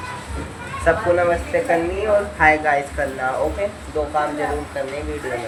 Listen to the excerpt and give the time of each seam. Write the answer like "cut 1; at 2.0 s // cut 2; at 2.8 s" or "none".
none